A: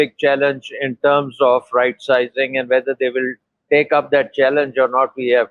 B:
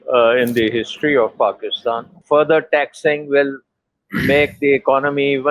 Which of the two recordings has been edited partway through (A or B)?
B